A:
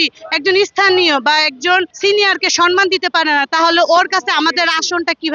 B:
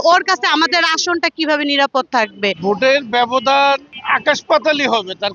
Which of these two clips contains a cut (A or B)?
B